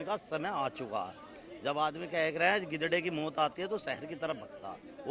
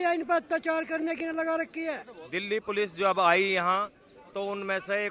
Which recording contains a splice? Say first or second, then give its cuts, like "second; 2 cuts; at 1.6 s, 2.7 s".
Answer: second; 1 cut; at 2.1 s